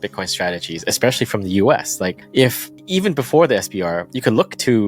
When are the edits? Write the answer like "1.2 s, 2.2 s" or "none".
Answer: 2.2 s